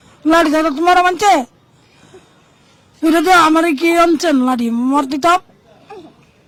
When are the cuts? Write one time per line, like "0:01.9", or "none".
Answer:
none